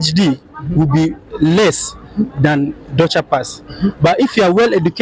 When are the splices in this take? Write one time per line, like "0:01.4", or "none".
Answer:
none

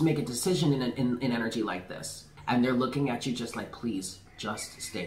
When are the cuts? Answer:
0:02.3

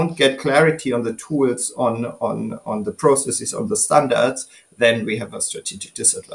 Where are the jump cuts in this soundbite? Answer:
none

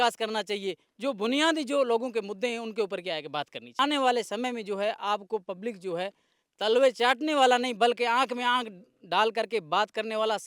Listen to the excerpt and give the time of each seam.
0:03.7

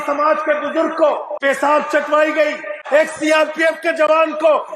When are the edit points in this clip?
0:01.3
0:02.8

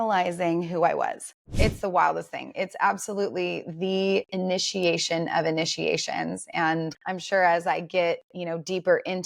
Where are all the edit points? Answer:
0:01.5
0:06.9

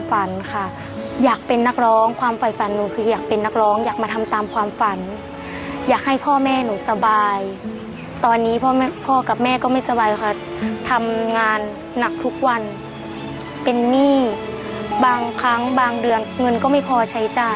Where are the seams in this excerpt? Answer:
0:14.8

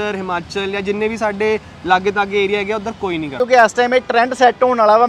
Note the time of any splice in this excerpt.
0:03.4

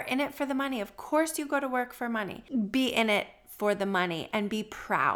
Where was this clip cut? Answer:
0:02.3

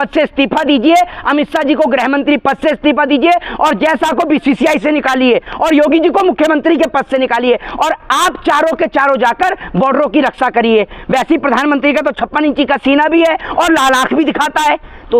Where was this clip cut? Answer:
none

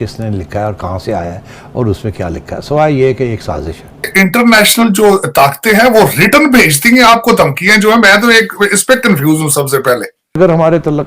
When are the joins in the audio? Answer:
0:04.1
0:10.2

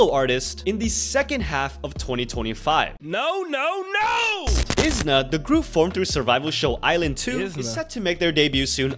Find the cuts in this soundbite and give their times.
0:03.0
0:04.6

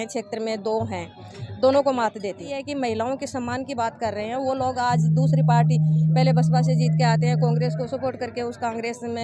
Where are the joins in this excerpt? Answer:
0:02.5

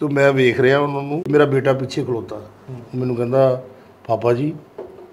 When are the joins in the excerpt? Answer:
0:01.3

